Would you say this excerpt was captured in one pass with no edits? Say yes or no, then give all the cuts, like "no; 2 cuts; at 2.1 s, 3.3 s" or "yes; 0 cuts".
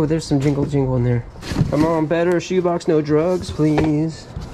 no; 1 cut; at 1.4 s